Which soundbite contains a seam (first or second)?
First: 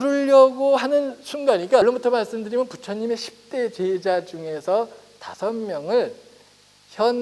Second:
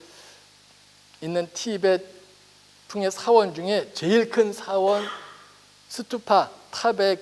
first